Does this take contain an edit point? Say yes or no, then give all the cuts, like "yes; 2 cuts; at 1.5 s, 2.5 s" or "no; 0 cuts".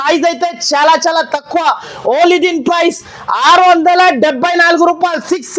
no; 0 cuts